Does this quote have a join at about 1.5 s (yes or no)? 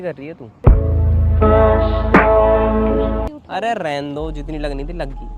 no